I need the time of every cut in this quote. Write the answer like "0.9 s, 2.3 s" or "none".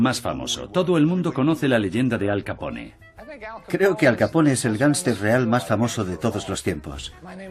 6.3 s